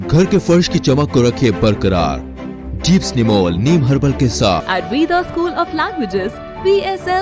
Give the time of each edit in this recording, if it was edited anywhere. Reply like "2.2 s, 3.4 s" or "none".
4.6 s